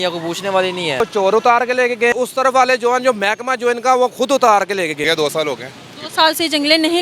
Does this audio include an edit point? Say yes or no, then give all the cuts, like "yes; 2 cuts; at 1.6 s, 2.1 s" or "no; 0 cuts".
yes; 3 cuts; at 1.0 s, 2.1 s, 5.0 s